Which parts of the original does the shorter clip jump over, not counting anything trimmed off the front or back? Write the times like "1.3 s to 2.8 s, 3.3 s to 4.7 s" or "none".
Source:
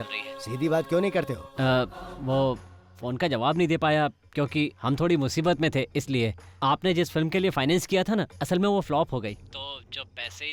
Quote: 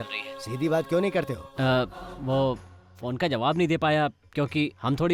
none